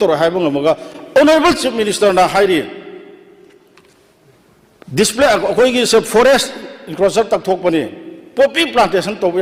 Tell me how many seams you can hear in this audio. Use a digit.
0